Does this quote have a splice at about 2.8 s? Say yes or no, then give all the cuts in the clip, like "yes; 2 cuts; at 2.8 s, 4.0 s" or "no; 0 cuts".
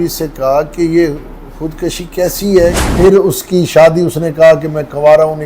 yes; 1 cut; at 2.8 s